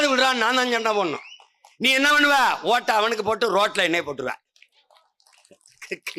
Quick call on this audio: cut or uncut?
uncut